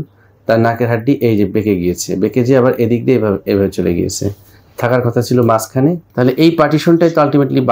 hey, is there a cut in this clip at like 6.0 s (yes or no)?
yes